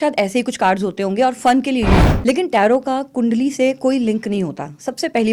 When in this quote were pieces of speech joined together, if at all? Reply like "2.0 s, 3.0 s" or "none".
2.1 s